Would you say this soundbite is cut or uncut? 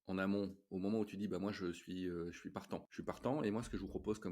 cut